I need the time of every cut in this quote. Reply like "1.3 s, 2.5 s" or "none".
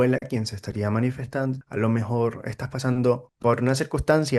1.6 s, 3.3 s